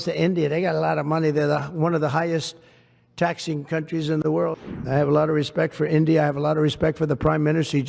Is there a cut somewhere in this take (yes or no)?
yes